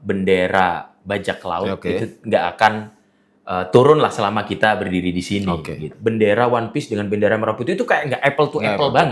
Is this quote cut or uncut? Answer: cut